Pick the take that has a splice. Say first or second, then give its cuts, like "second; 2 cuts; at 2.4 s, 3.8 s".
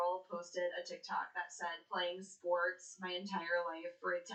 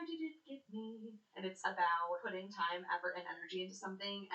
second; 2 cuts; at 1.4 s, 2.2 s